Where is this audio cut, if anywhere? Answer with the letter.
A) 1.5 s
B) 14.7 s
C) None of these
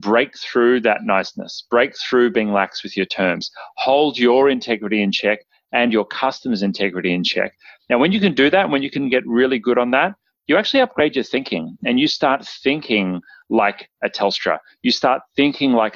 C